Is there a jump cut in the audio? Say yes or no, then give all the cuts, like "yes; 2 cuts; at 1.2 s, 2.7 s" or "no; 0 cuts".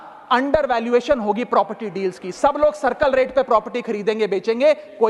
no; 0 cuts